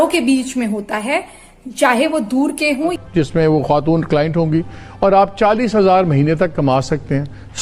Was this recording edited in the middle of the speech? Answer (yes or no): yes